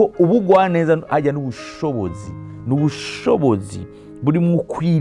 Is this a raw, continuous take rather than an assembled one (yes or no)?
yes